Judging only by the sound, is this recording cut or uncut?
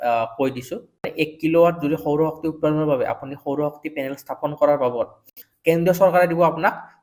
cut